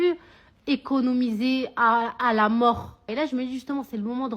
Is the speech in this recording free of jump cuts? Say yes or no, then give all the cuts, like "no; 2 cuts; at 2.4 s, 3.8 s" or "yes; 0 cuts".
no; 1 cut; at 3.1 s